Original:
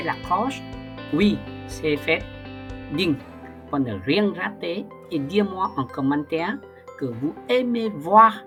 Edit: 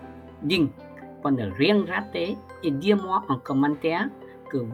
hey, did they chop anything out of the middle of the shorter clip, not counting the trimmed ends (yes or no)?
no